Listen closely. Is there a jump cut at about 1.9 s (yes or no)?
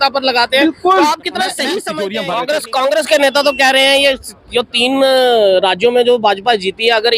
yes